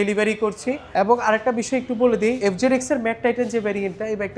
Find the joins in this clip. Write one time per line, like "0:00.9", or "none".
0:00.8
0:02.4

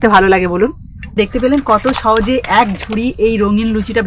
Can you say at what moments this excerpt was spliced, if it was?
0:01.2

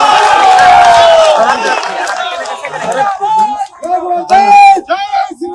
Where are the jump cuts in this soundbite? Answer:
none

